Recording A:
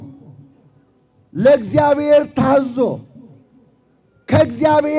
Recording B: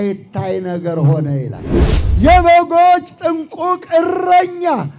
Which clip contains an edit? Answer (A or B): B